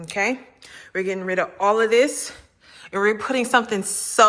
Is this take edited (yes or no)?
no